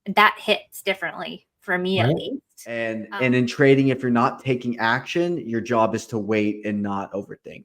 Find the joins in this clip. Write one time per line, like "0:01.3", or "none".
0:02.9

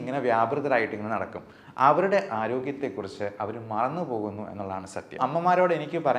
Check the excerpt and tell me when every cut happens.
0:05.2

